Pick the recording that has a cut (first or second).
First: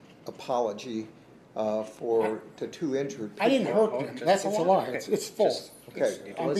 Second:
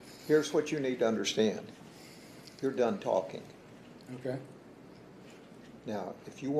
first